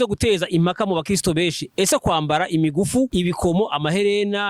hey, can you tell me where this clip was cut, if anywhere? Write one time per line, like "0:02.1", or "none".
0:03.1